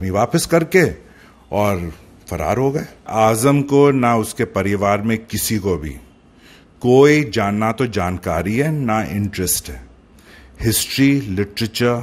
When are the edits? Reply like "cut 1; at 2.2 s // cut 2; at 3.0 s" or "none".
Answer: cut 1; at 3.1 s